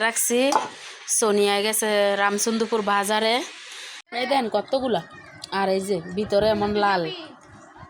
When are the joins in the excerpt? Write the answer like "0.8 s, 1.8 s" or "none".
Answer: 4.0 s